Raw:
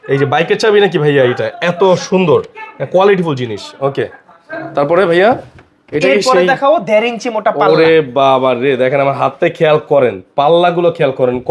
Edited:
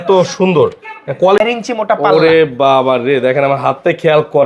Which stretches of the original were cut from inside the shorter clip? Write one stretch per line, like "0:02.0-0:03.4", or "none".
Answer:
0:03.1-0:07.0